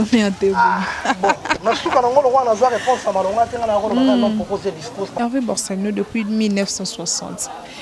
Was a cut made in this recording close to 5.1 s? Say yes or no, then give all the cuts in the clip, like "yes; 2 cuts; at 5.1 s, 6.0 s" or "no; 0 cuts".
yes; 1 cut; at 5.1 s